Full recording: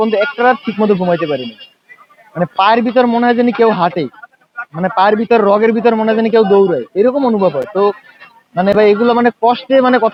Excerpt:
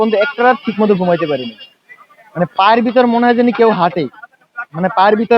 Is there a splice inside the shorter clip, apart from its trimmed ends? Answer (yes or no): no